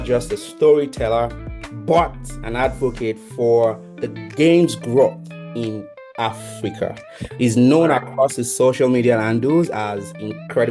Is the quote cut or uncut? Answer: uncut